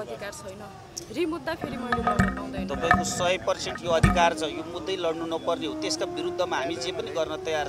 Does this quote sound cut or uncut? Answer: uncut